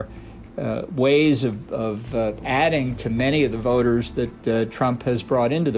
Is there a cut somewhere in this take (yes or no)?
no